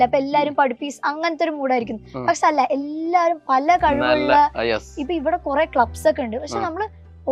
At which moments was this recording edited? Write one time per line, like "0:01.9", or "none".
none